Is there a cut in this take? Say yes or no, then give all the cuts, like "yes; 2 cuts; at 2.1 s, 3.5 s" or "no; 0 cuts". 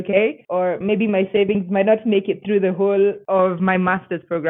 no; 0 cuts